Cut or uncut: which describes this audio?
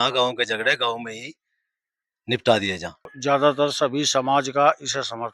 cut